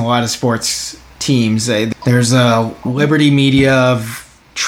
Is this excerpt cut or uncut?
cut